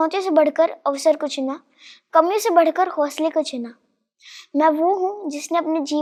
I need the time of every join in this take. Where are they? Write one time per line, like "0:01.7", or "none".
none